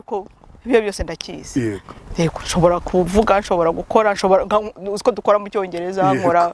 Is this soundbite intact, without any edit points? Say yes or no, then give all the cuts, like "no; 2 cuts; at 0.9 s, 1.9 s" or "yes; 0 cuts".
yes; 0 cuts